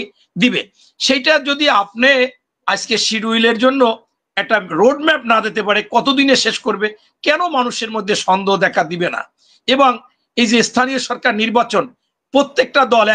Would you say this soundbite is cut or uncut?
uncut